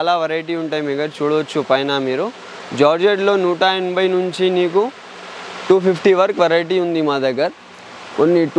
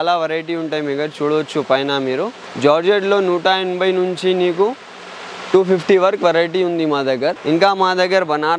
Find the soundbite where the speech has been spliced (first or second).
second